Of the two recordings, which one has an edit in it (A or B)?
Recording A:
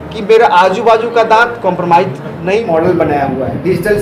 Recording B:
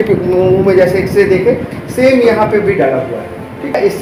A